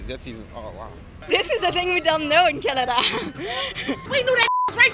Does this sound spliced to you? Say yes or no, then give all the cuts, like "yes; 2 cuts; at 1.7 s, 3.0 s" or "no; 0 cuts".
yes; 2 cuts; at 1.1 s, 4.0 s